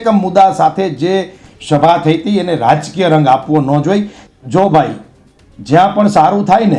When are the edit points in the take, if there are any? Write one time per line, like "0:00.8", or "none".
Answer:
0:04.2